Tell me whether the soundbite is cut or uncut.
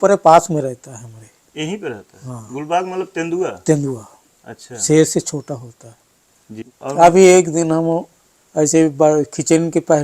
cut